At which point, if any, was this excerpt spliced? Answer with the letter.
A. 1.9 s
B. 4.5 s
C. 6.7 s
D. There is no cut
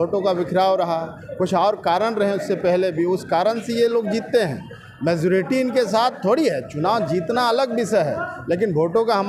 D